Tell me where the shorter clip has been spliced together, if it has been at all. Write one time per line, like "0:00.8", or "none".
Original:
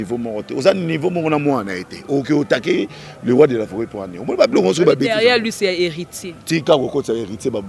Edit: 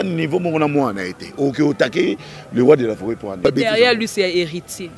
0:03.5